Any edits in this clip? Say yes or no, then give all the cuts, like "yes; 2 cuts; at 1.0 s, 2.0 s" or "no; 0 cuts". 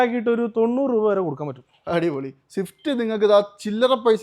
no; 0 cuts